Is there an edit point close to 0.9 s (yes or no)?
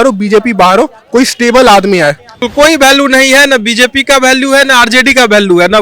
no